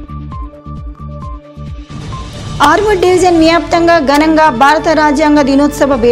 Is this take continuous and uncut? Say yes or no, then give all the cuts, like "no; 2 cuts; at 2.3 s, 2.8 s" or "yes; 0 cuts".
yes; 0 cuts